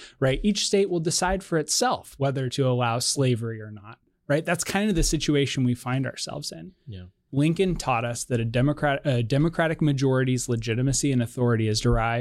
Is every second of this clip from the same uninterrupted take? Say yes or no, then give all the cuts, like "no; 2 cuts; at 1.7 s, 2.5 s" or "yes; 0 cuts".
no; 1 cut; at 7.2 s